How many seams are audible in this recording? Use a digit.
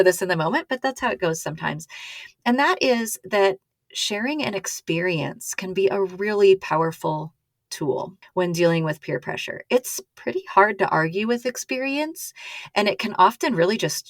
1